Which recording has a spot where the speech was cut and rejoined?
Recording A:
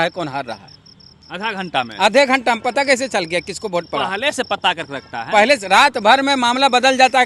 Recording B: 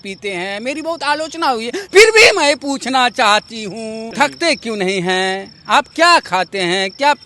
B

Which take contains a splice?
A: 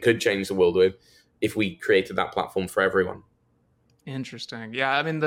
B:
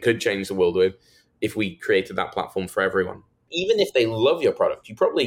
B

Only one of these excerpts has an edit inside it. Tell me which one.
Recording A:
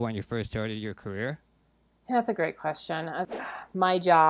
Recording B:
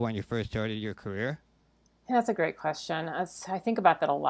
A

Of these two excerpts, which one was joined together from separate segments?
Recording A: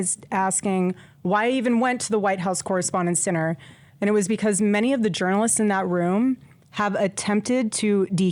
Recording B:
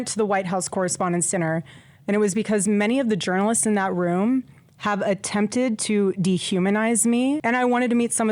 B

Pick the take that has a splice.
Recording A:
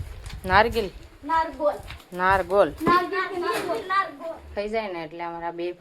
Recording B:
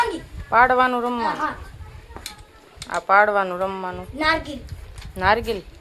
A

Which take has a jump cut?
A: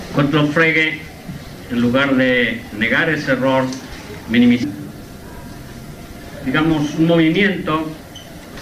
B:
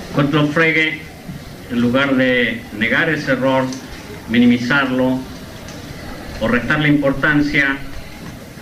B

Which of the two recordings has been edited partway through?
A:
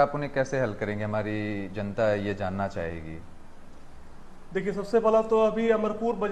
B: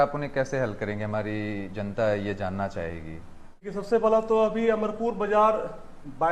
B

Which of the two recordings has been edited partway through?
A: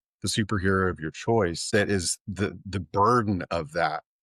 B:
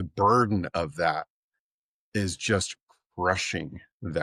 A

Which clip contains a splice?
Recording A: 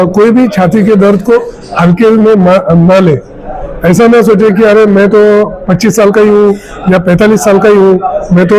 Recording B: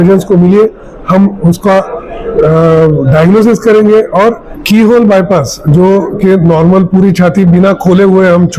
B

